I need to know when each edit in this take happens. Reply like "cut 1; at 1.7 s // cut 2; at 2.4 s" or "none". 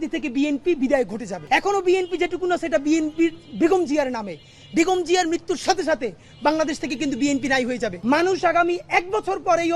cut 1; at 1.3 s // cut 2; at 8.0 s